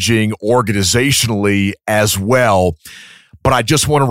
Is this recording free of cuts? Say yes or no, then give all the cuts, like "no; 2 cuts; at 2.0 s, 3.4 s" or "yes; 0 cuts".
yes; 0 cuts